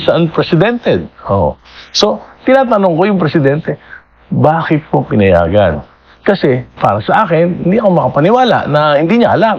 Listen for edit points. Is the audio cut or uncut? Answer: uncut